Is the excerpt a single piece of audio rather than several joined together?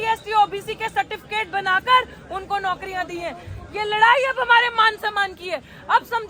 yes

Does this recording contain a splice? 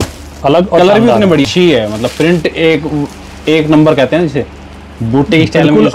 yes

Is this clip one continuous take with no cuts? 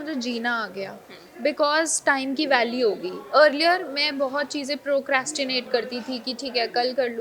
yes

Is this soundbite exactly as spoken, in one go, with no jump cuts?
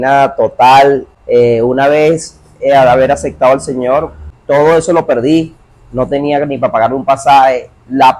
no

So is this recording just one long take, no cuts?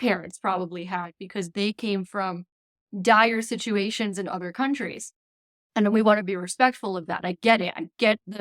yes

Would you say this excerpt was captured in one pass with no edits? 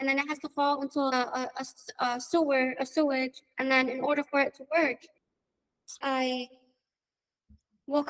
no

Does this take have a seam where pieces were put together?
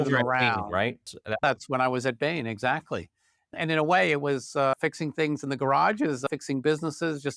yes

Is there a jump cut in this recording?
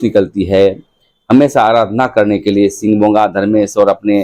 no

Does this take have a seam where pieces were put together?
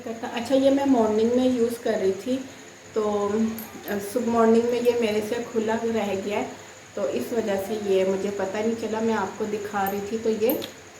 no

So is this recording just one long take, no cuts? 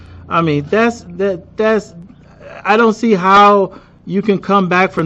yes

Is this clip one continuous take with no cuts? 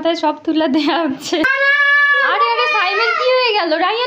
no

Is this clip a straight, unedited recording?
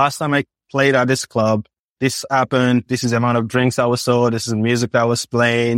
yes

